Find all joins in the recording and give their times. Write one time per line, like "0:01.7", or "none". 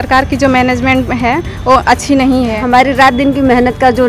0:02.6